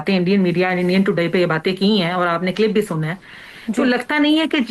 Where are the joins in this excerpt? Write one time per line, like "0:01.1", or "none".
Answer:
none